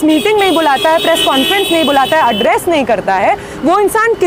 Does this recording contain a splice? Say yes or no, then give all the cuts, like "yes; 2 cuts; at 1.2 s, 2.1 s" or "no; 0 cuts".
no; 0 cuts